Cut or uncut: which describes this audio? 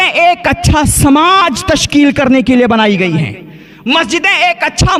uncut